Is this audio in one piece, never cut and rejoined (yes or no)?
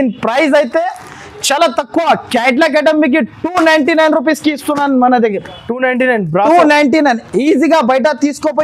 yes